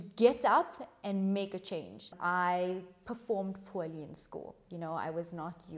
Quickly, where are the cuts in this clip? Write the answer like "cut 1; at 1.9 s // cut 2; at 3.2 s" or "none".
cut 1; at 2.1 s